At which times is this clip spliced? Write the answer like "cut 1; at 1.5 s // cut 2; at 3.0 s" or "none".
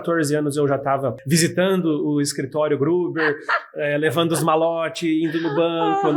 cut 1; at 1.2 s